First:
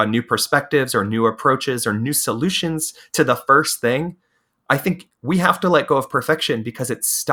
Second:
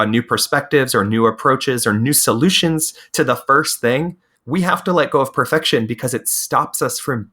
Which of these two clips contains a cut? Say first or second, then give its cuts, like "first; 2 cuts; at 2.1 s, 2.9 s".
second; 1 cut; at 4.3 s